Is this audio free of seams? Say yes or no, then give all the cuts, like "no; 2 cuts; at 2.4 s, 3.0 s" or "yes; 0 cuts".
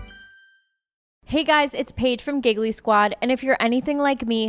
no; 1 cut; at 1.1 s